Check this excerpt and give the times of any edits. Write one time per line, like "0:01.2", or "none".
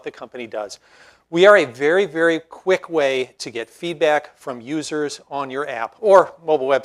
none